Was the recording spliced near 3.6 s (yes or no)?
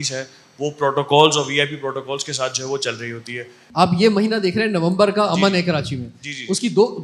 yes